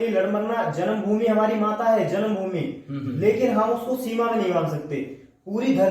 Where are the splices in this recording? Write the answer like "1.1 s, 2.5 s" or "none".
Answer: none